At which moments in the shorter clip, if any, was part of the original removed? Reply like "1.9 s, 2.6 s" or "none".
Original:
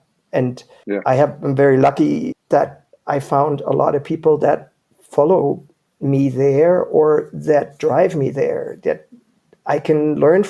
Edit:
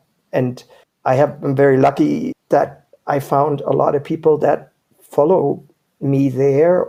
none

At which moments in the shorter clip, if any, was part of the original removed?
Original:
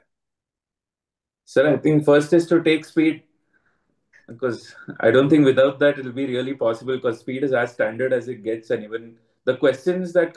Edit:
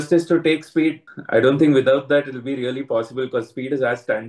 1.1 s

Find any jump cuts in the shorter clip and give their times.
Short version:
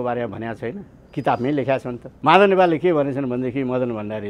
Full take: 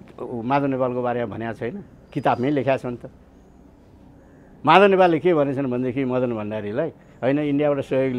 2.1 s

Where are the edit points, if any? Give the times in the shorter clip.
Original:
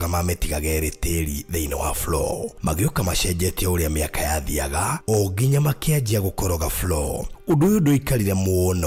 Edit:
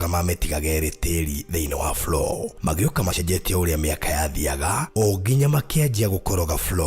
3.2 s

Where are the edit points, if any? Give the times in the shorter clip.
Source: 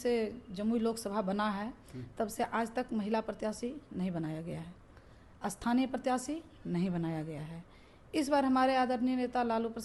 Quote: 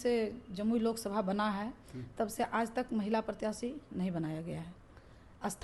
none

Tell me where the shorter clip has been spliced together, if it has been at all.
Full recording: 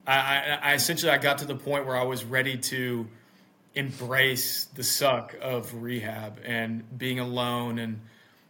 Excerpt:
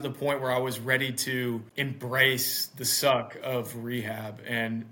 1.7 s

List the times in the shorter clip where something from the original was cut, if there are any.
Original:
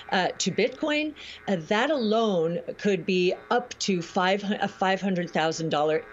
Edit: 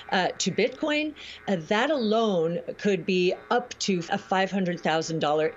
4.1 s

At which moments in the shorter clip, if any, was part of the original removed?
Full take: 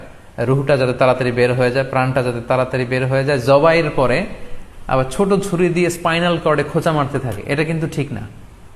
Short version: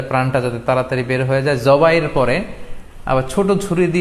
none

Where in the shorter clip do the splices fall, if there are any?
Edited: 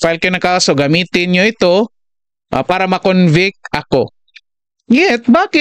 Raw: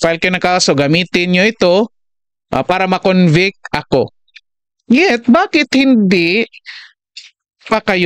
none

